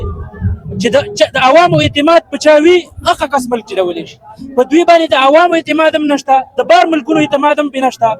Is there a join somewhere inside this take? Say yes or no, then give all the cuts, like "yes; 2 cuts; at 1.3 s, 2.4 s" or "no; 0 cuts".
no; 0 cuts